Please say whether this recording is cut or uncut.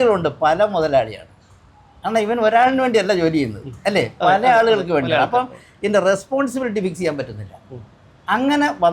uncut